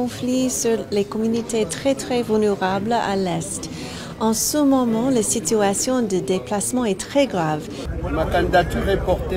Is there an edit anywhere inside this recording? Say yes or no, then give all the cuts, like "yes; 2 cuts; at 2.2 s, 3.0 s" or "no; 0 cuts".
yes; 1 cut; at 7.8 s